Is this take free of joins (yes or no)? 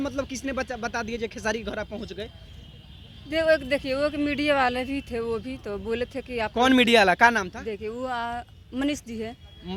yes